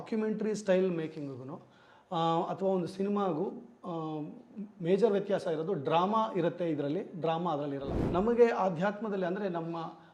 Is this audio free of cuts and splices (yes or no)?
no